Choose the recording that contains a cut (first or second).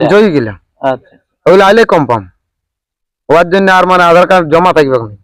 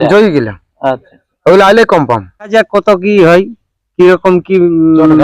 second